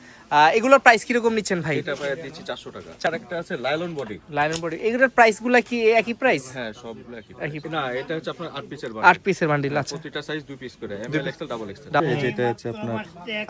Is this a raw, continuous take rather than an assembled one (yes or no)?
no